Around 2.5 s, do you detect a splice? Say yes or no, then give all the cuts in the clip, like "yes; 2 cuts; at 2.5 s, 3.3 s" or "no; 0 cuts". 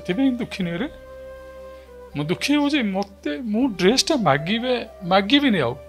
no; 0 cuts